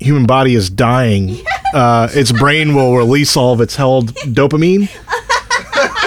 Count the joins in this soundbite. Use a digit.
0